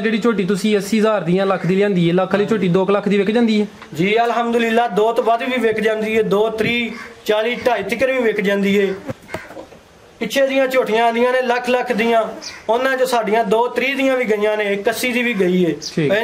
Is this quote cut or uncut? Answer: uncut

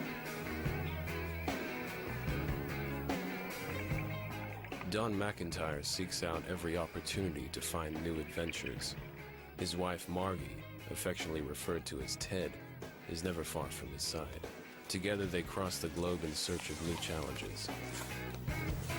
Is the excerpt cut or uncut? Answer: cut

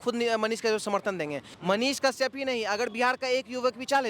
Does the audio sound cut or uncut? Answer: cut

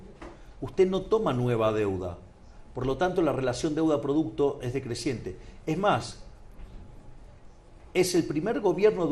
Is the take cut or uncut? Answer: uncut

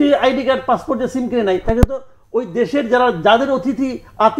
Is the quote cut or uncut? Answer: uncut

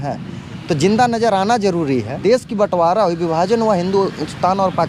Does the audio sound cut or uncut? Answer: cut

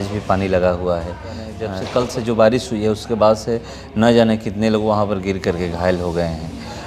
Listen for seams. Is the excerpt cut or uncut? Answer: uncut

